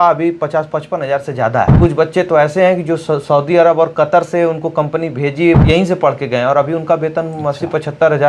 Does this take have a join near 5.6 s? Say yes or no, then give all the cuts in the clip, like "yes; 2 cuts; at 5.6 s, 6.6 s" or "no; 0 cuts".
yes; 2 cuts; at 1.7 s, 5.6 s